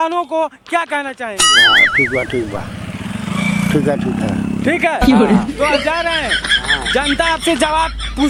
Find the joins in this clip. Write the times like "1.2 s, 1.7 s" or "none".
none